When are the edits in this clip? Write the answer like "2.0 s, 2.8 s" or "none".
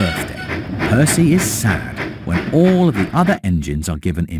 none